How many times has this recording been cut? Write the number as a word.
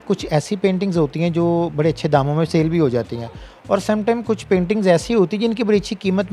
zero